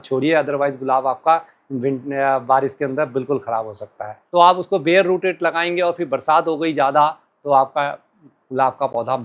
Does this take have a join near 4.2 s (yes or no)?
yes